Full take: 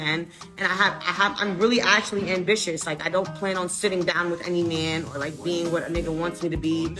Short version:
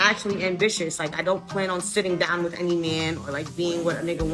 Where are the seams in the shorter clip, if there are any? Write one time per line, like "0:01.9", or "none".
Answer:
none